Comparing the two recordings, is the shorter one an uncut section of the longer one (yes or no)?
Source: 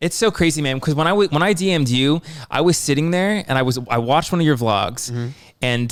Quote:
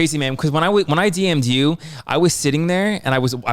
yes